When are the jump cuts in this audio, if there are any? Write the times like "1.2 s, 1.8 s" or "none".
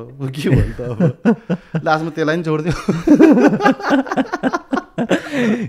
none